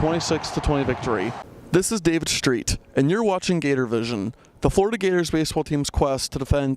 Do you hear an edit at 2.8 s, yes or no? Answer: no